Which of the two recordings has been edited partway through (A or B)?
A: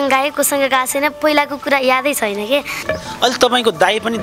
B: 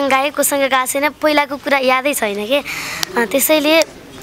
A